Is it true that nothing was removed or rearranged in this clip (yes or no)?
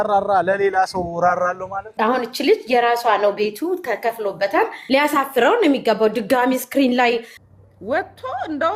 no